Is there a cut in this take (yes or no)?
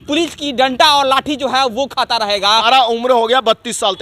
yes